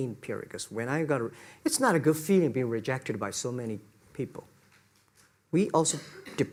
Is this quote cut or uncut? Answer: uncut